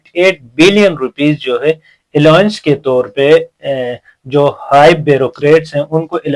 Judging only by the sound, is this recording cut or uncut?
uncut